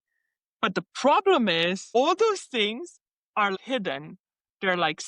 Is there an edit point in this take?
yes; 1 cut; at 3.6 s

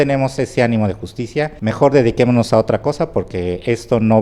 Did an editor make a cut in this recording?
no; 0 cuts

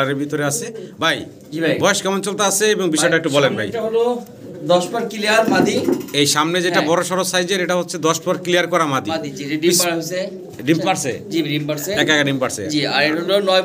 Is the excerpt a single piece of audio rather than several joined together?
yes; 0 cuts

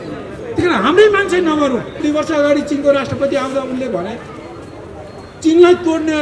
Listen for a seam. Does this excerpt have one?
yes; 1 cut; at 2.0 s

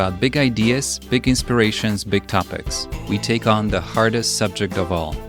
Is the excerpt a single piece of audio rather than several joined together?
yes; 0 cuts

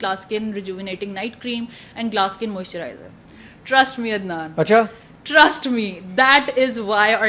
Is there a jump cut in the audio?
no; 0 cuts

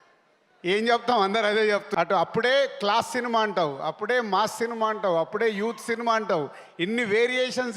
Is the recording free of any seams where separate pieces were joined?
no; 1 cut; at 1.9 s

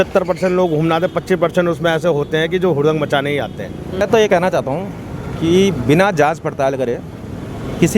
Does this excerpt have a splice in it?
yes; 1 cut; at 4.0 s

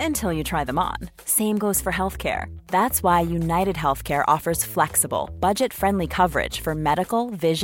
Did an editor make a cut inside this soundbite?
no; 0 cuts

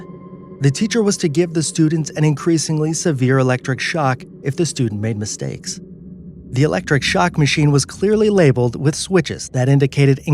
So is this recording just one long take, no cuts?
no; 1 cut; at 2.1 s

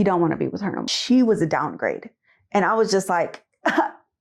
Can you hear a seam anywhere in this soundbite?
yes; 1 cut; at 0.9 s

